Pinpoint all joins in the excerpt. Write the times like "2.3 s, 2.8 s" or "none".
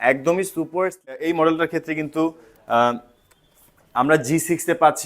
1.1 s

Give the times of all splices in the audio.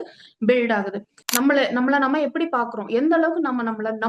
1.1 s

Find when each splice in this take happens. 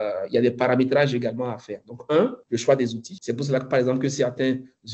2.4 s, 3.1 s

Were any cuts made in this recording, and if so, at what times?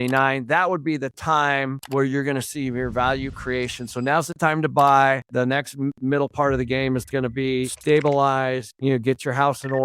1.8 s, 7.8 s

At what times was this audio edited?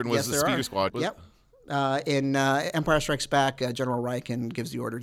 0.9 s

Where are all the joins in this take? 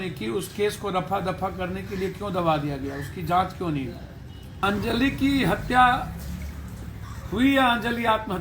4.6 s

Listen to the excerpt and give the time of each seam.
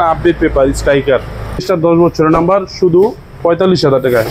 1.7 s

